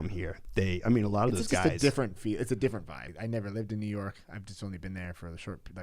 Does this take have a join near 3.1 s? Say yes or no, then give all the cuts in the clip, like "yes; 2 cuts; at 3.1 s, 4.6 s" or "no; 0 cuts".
yes; 1 cut; at 3.1 s